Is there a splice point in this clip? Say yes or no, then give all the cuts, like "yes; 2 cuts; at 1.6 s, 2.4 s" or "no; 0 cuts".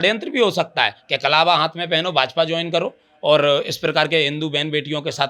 no; 0 cuts